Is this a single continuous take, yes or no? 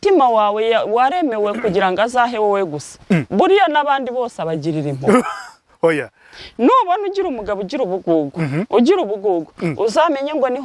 yes